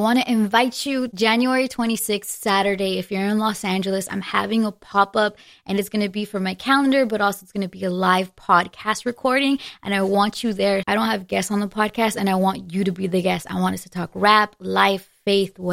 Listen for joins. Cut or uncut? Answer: cut